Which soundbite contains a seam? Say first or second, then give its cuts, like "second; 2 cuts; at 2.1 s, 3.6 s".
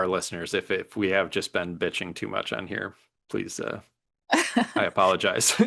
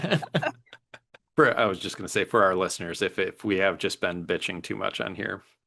second; 1 cut; at 1.2 s